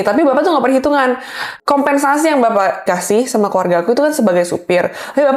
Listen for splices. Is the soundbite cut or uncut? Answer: cut